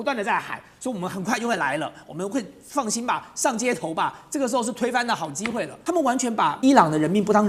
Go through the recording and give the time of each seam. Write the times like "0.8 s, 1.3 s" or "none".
5.7 s, 6.6 s

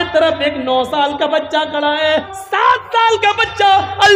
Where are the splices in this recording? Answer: 2.4 s

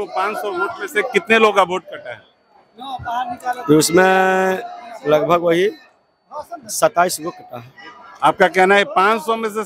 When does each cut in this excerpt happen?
none

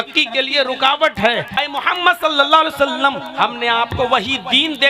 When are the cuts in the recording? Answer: 1.5 s

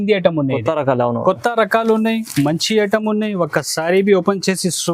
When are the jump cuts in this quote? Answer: none

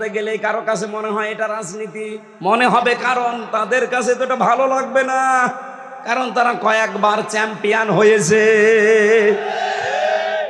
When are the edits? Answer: none

